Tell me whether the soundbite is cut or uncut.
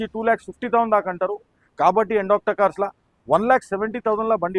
uncut